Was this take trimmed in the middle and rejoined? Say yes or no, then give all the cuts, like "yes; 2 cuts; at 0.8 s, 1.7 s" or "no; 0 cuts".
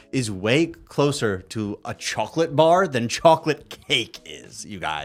no; 0 cuts